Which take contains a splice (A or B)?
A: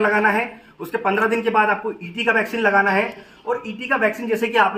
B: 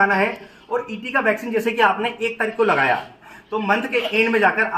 B